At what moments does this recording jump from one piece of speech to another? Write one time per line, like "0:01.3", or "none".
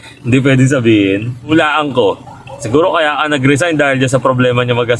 0:01.4